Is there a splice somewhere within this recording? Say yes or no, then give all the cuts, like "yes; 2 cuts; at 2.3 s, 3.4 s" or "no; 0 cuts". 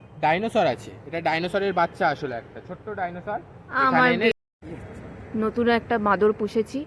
no; 0 cuts